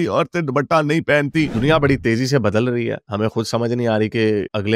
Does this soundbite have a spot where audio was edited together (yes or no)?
yes